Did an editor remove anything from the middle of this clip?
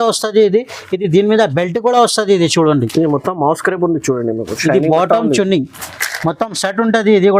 no; 0 cuts

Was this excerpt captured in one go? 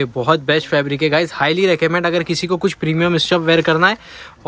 yes; 0 cuts

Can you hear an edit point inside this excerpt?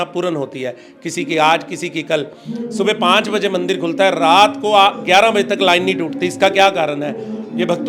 no; 0 cuts

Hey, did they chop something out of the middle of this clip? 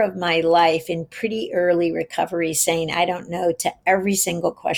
no; 0 cuts

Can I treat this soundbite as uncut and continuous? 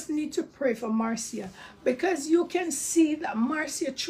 yes; 0 cuts

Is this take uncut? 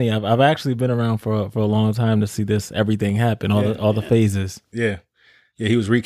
yes; 0 cuts

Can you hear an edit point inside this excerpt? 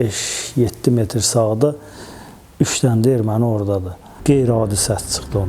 yes; 1 cut; at 4.2 s

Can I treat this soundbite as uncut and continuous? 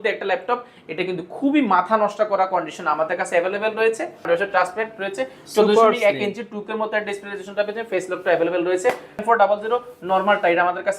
no; 2 cuts; at 4.3 s, 9.2 s

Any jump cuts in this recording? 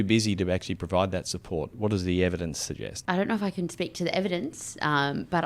yes; 2 cuts; at 1.7 s, 2.9 s

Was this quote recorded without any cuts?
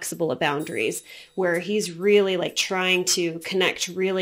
yes; 0 cuts

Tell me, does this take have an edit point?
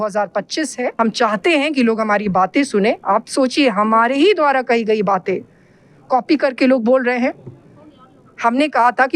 no; 0 cuts

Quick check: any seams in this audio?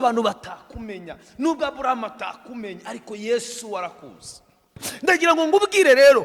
yes; 1 cut; at 4.8 s

